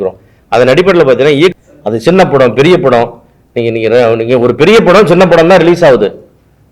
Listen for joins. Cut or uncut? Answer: cut